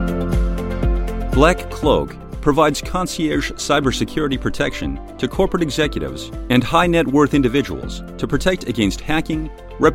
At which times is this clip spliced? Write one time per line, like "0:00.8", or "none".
0:01.3